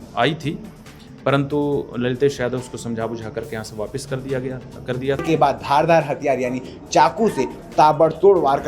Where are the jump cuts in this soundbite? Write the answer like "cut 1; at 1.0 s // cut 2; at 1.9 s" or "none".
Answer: cut 1; at 5.2 s